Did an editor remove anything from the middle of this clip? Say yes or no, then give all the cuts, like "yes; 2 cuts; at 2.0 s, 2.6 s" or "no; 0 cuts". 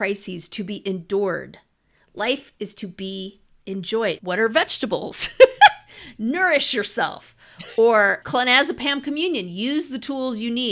yes; 2 cuts; at 4.2 s, 8.2 s